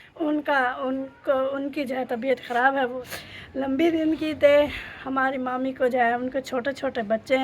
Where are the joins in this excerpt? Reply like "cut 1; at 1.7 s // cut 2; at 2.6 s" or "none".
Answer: cut 1; at 3.0 s